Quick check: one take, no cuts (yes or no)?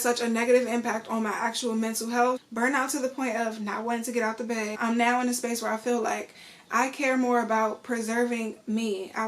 no